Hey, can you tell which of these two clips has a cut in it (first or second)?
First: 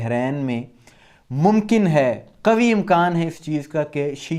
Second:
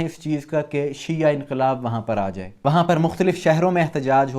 second